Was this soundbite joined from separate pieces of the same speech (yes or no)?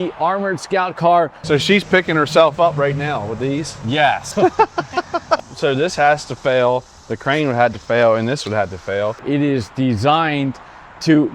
yes